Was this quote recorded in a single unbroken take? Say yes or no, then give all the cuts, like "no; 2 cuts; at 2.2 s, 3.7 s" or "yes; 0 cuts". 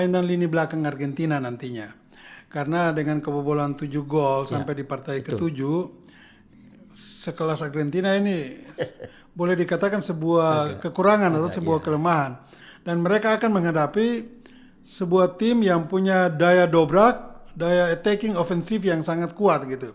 yes; 0 cuts